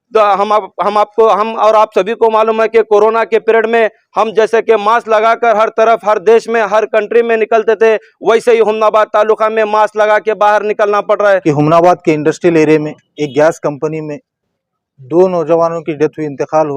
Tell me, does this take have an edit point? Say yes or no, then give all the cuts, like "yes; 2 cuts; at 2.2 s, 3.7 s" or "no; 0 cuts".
yes; 1 cut; at 11.4 s